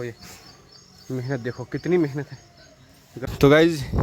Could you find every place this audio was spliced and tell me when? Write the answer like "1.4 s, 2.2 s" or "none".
3.1 s